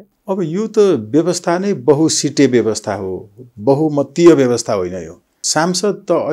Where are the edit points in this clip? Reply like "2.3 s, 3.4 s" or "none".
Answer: 5.4 s